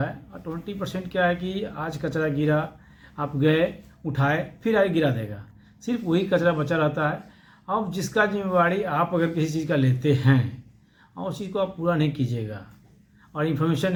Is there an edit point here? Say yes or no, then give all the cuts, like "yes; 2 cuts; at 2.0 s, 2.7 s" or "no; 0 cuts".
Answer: no; 0 cuts